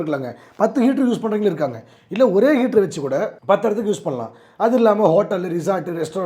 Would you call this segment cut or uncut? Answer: cut